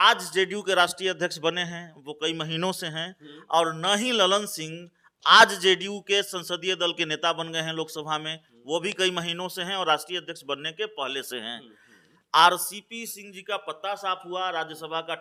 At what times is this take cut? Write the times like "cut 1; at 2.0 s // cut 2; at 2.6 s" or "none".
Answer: none